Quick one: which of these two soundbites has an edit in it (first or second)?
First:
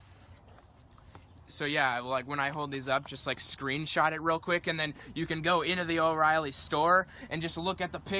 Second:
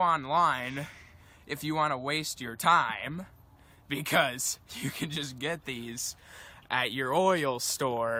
first